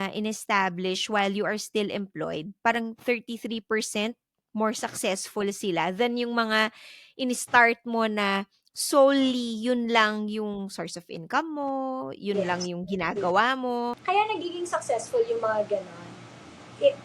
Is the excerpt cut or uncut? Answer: cut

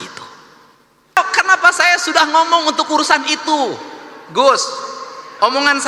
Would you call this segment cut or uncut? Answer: cut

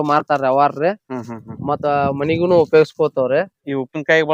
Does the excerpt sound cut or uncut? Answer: uncut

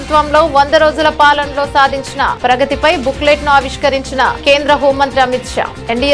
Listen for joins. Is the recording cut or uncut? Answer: uncut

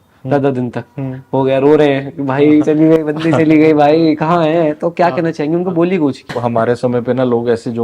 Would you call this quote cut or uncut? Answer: cut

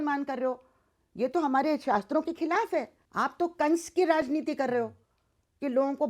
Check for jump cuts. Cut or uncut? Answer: cut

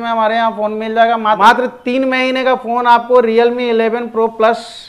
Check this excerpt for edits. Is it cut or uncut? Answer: cut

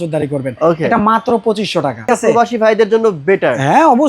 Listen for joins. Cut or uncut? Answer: cut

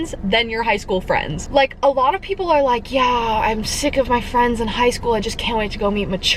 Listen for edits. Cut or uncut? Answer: uncut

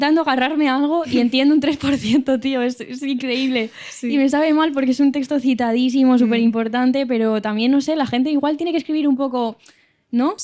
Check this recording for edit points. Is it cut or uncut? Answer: uncut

